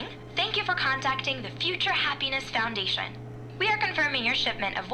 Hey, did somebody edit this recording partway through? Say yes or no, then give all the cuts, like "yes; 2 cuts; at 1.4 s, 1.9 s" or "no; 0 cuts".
no; 0 cuts